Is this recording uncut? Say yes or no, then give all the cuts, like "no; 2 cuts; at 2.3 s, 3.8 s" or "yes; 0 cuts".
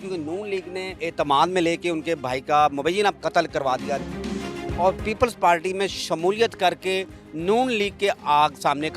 no; 3 cuts; at 1.0 s, 3.2 s, 4.4 s